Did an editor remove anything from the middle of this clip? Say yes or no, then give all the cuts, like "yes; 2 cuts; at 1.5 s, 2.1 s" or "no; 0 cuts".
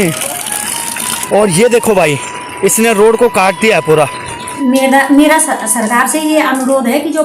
yes; 2 cuts; at 1.1 s, 4.6 s